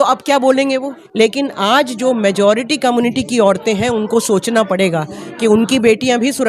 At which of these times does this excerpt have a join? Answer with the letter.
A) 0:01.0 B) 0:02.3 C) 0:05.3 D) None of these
A